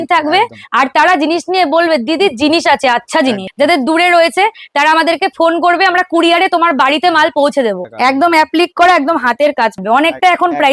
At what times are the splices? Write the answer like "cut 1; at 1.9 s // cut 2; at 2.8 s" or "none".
cut 1; at 3.5 s // cut 2; at 7.9 s // cut 3; at 9.8 s